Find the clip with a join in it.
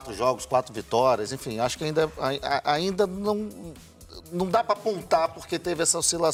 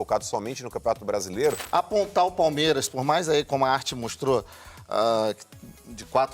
second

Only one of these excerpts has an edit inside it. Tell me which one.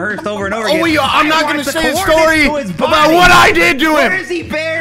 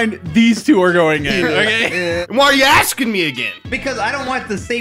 second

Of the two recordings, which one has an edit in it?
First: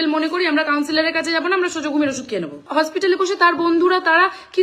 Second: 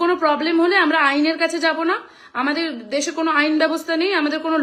first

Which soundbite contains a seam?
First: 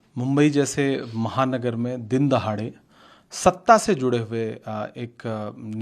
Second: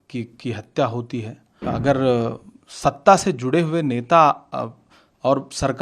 second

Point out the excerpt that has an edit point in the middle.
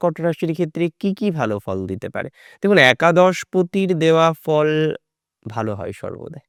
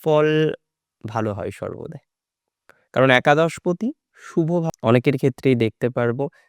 second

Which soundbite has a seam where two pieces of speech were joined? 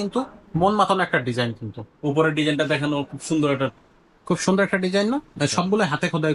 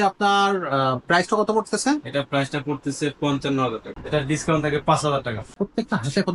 second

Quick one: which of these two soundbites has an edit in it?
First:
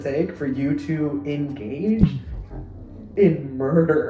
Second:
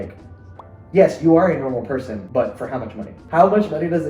second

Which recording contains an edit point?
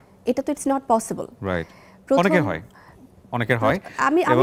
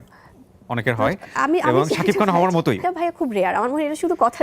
second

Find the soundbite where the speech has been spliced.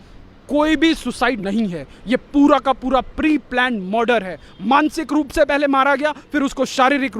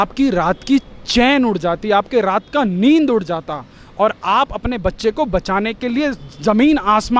first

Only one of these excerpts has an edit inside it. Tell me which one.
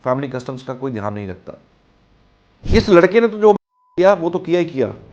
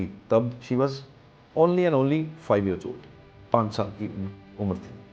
first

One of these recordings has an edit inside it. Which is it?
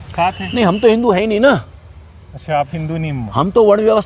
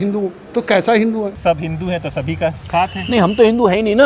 second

